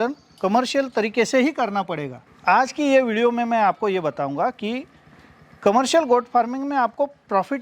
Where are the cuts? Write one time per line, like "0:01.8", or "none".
0:02.3